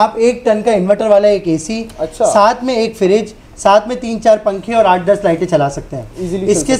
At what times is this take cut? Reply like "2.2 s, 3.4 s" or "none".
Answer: none

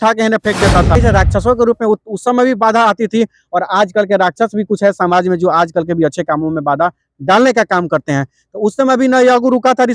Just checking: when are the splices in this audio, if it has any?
1.0 s

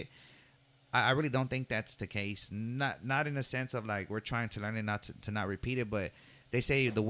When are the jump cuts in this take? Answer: none

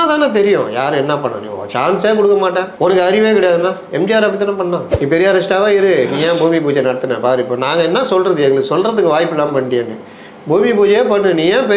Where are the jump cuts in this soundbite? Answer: 4.9 s

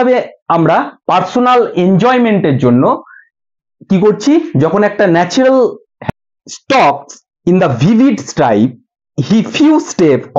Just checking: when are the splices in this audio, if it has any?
5.9 s

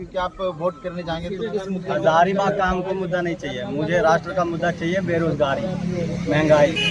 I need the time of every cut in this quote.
none

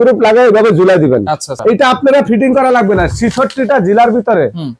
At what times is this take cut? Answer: 1.5 s

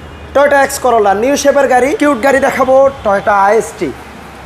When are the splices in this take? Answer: 1.9 s

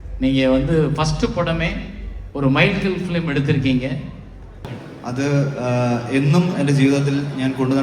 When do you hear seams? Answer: 4.7 s

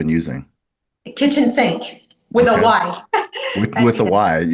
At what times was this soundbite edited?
none

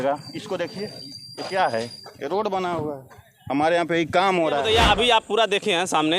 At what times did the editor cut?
4.6 s

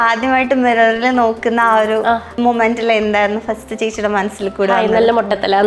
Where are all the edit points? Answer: 2.3 s

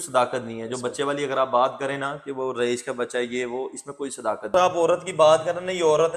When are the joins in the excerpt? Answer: 4.4 s

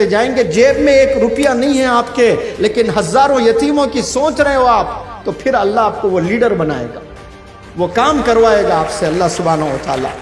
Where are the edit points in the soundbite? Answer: none

